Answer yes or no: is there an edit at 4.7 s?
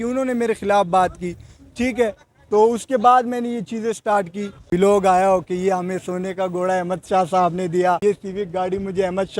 yes